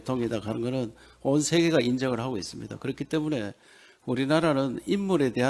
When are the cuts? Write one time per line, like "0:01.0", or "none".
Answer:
none